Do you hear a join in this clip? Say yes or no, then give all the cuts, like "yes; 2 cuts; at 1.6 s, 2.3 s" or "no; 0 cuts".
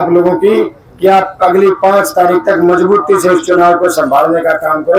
no; 0 cuts